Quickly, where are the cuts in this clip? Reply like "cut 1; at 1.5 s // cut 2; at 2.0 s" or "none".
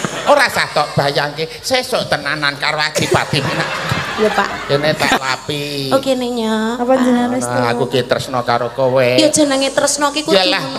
cut 1; at 4.2 s